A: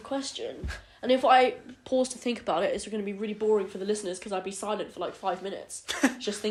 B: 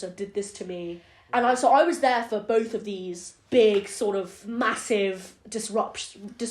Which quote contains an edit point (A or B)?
B